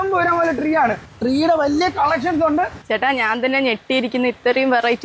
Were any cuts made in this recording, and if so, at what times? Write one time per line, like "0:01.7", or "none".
0:01.1
0:02.8